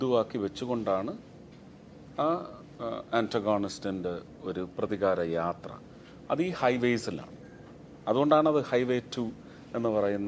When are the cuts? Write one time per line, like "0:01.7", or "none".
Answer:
none